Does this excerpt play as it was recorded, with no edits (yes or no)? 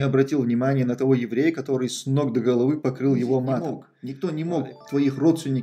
no